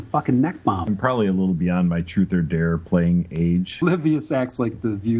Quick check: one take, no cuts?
no; 2 cuts; at 0.8 s, 3.7 s

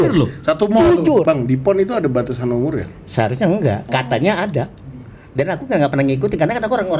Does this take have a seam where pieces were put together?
yes; 2 cuts; at 1.2 s, 3.9 s

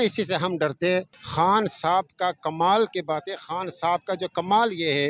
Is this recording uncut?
no; 1 cut; at 1.2 s

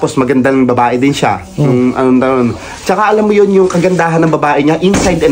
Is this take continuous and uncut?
yes; 0 cuts

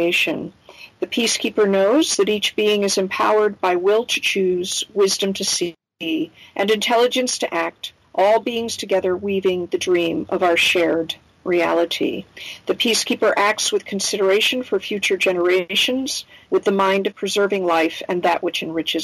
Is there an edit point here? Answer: yes; 2 cuts; at 16.0 s, 17.1 s

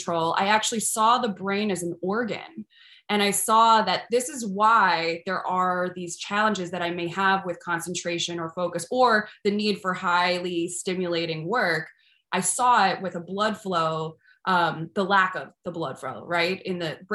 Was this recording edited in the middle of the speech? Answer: no; 0 cuts

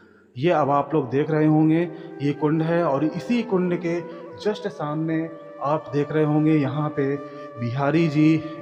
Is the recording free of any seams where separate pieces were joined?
yes; 0 cuts

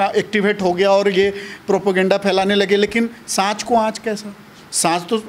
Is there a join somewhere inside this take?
no; 0 cuts

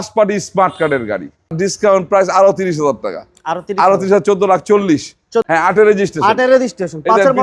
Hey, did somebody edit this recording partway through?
yes; 2 cuts; at 1.5 s, 5.5 s

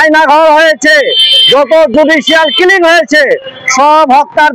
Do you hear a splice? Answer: no; 0 cuts

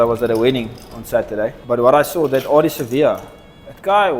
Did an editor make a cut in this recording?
yes; 1 cut; at 1.6 s

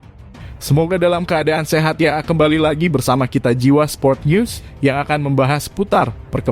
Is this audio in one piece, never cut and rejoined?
yes; 0 cuts

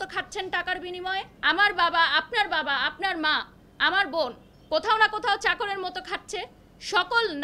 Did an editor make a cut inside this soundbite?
yes; 1 cut; at 1.3 s

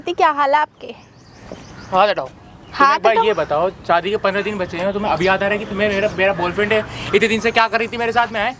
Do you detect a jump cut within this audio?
no; 0 cuts

